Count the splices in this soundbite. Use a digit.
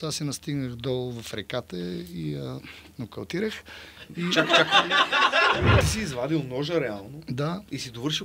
1